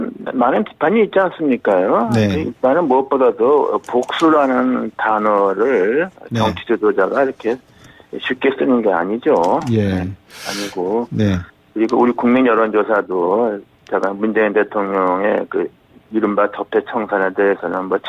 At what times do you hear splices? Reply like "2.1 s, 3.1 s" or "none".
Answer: 16.6 s